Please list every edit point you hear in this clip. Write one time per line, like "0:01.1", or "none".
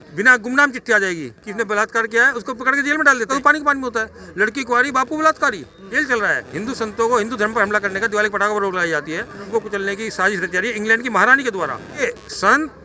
0:03.3
0:05.8
0:09.5
0:12.0